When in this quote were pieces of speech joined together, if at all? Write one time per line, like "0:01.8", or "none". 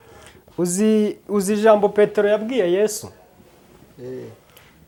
none